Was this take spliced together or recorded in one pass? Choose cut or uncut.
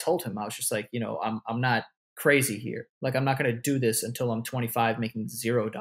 cut